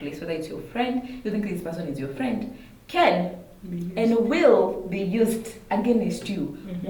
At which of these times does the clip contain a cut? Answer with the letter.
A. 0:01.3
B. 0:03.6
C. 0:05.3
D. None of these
D